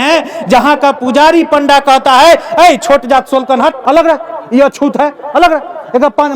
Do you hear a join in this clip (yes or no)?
yes